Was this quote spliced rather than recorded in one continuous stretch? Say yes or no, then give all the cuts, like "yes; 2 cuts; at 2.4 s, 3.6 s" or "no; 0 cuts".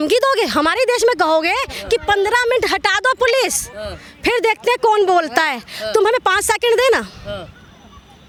no; 0 cuts